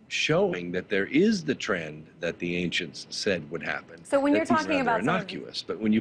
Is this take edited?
yes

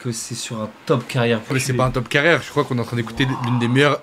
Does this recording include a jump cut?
yes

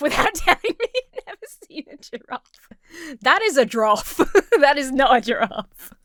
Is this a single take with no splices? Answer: yes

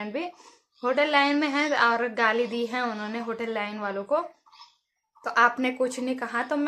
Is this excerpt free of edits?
yes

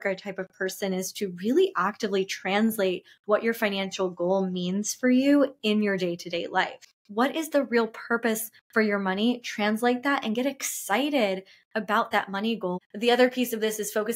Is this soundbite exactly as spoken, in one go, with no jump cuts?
no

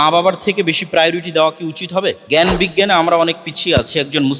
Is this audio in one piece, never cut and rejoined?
no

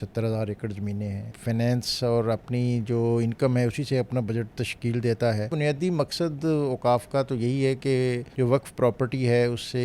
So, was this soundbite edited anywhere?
yes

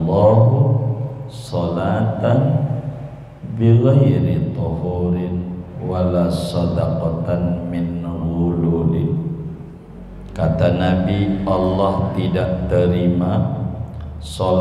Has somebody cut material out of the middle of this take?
no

